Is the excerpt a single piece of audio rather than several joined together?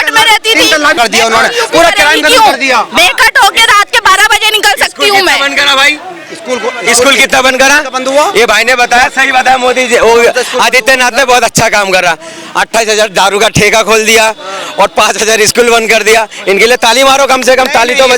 no; 1 cut; at 1.0 s

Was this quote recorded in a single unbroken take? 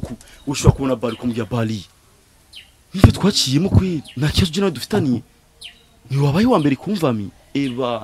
yes; 0 cuts

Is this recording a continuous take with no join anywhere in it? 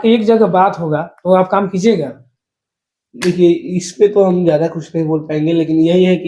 yes; 0 cuts

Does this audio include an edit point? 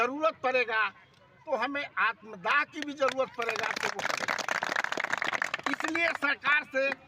no; 0 cuts

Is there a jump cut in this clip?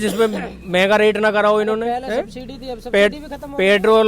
no; 0 cuts

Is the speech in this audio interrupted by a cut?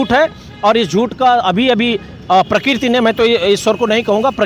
no; 0 cuts

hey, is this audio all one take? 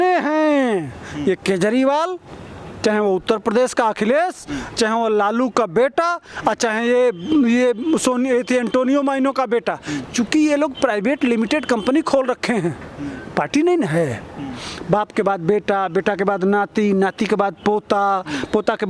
yes; 0 cuts

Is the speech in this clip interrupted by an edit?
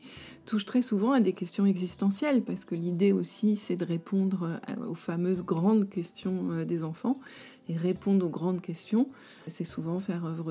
yes; 1 cut; at 9.5 s

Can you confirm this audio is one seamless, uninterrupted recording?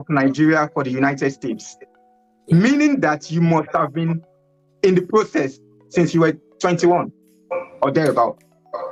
yes; 0 cuts

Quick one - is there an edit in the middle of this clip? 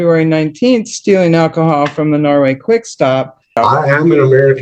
yes; 1 cut; at 3.5 s

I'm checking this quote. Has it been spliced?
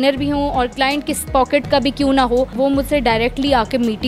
yes; 1 cut; at 2.5 s

